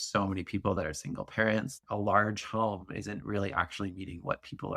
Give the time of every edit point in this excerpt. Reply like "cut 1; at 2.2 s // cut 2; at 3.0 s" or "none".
cut 1; at 0.8 s // cut 2; at 1.7 s